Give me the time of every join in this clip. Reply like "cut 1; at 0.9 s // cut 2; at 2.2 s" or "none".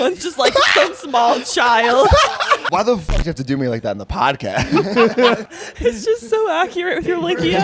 cut 1; at 2.3 s // cut 2; at 5.5 s